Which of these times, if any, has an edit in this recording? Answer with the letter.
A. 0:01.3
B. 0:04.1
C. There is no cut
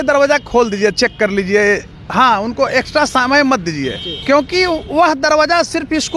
B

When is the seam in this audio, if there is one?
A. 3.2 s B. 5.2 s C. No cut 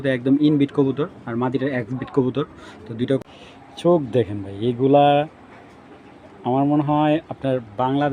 A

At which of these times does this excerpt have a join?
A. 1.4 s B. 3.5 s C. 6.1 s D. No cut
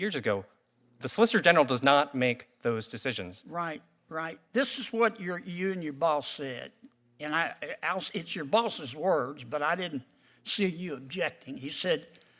D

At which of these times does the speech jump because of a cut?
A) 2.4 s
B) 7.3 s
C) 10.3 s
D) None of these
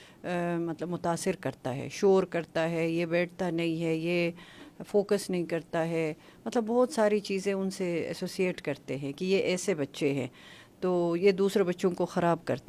D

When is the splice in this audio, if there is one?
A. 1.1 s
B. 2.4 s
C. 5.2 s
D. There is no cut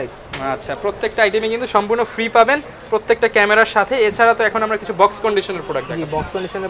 D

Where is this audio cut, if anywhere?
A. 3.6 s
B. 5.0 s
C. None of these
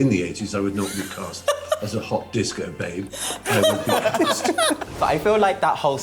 B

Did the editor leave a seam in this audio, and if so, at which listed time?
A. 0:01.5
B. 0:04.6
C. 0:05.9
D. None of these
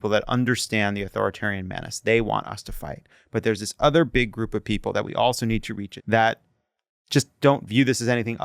C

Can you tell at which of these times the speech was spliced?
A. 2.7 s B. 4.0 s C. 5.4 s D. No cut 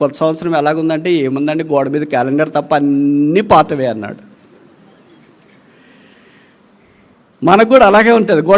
D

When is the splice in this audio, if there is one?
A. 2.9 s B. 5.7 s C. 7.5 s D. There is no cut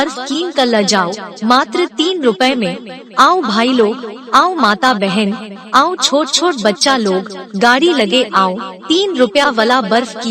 A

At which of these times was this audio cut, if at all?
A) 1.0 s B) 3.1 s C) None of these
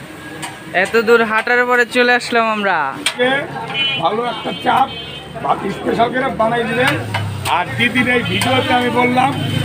B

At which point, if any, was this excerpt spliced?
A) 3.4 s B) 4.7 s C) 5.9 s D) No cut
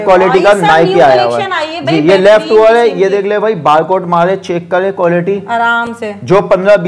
D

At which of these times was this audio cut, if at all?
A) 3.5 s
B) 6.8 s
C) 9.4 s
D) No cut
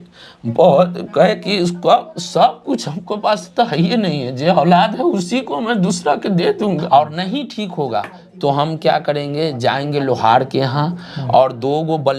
B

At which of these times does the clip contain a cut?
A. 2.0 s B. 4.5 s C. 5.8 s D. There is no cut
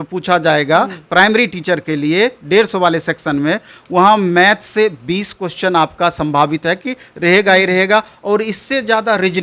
D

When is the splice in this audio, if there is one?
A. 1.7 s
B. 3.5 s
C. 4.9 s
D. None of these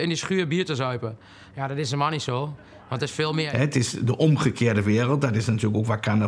B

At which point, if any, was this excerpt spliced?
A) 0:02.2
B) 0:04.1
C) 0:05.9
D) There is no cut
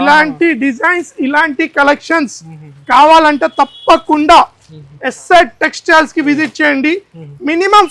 D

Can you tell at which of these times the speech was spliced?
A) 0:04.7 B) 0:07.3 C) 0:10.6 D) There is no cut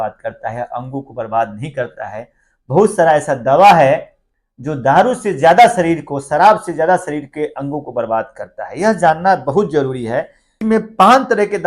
C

